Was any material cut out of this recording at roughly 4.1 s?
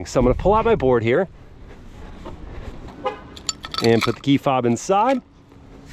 no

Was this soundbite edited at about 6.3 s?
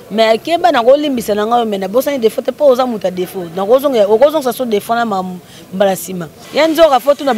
yes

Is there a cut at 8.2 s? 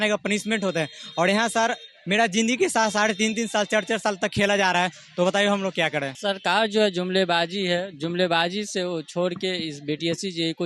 no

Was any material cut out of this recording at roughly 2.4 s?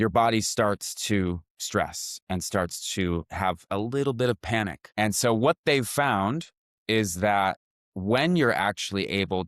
no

